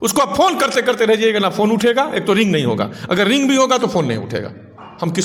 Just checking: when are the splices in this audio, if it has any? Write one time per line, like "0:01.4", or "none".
none